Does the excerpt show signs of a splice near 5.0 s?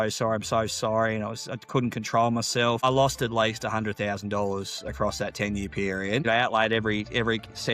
no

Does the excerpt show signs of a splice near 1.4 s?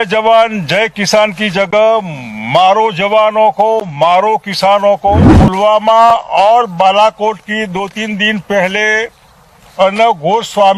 no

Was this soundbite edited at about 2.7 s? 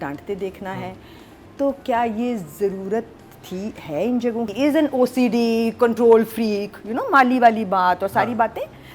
no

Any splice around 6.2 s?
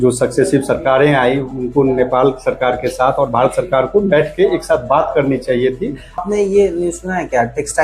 yes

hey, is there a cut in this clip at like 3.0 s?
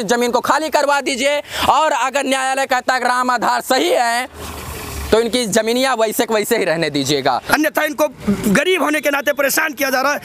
no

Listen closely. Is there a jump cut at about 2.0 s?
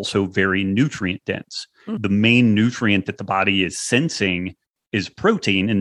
yes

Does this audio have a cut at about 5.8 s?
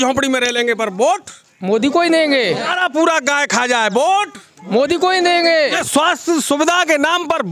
yes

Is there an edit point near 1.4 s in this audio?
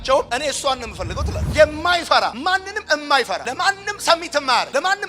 yes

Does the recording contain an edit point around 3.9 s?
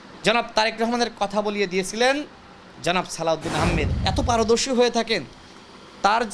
yes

